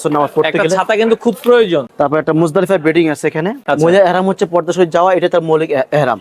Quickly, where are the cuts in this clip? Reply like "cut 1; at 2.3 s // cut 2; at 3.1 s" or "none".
cut 1; at 1.9 s // cut 2; at 3.6 s